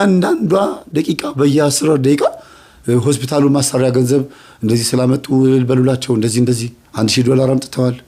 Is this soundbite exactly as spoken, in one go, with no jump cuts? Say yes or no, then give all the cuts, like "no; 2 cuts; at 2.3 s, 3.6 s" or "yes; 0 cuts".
yes; 0 cuts